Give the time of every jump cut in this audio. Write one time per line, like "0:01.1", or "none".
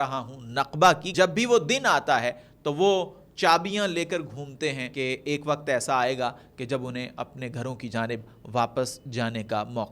0:01.1
0:04.9

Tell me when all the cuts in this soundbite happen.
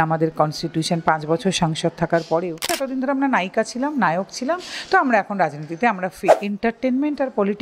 0:02.8
0:06.4

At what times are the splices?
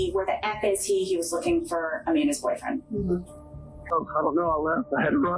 0:03.9

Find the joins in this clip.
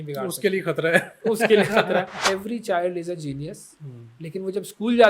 0:02.2

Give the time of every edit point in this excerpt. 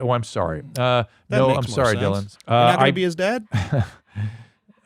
0:02.3
0:03.5

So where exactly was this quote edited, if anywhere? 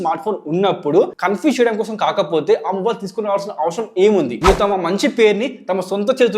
0:04.4

